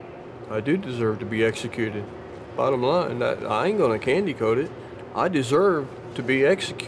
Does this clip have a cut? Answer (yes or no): no